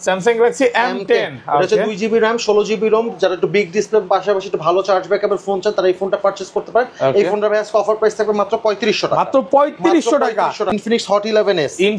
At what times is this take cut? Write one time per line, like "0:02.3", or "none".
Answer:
0:10.7